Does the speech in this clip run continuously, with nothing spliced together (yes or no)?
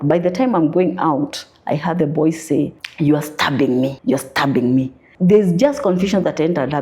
no